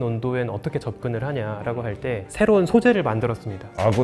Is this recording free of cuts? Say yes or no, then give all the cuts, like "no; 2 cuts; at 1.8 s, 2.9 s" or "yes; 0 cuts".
yes; 0 cuts